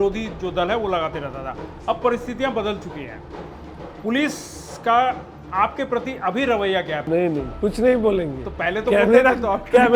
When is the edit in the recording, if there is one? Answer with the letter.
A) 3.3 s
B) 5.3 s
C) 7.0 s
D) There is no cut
C